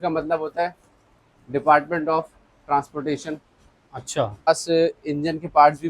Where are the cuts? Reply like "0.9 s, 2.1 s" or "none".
4.5 s

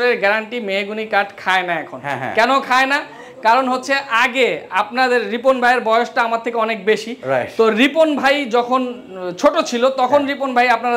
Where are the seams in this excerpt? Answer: none

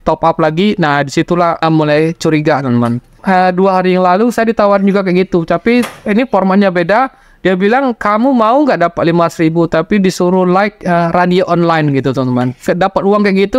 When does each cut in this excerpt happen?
1.6 s, 3.1 s, 12.6 s

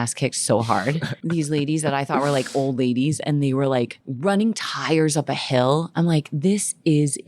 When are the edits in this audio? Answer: 1.2 s, 4.0 s

